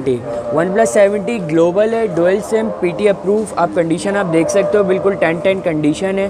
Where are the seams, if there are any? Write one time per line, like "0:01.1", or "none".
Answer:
none